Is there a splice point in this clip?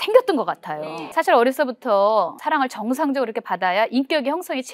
yes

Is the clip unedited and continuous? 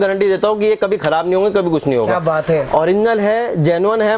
yes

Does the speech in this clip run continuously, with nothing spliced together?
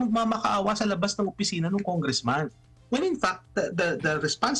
yes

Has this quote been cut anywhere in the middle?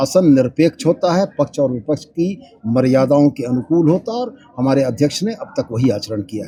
no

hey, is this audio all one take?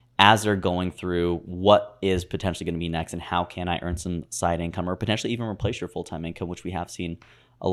yes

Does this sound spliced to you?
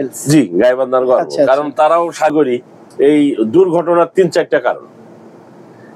yes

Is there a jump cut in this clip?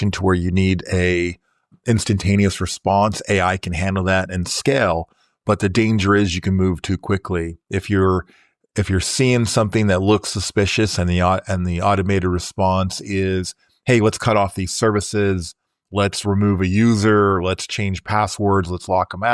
no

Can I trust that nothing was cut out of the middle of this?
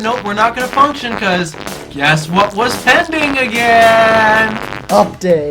yes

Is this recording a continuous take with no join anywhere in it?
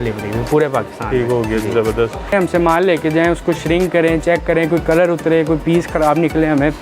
no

